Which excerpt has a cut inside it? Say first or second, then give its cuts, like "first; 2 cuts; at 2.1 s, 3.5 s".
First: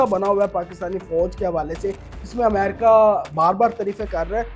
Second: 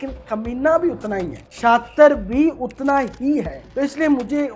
second; 2 cuts; at 1.4 s, 3.6 s